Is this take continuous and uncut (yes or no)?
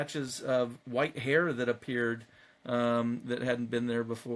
yes